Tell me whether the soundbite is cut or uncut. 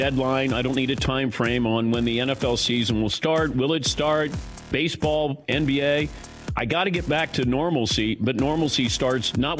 uncut